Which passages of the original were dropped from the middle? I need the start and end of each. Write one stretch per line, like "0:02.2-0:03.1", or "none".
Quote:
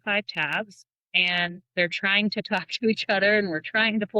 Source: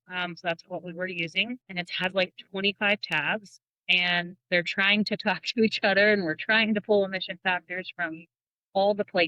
none